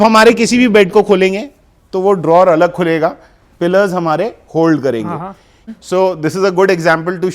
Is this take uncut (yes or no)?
no